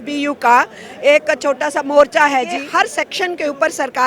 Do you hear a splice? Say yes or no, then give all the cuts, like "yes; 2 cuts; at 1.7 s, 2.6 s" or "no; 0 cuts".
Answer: yes; 1 cut; at 2.6 s